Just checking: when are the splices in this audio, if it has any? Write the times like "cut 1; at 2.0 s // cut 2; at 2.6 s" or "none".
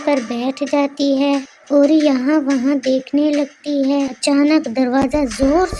cut 1; at 4.1 s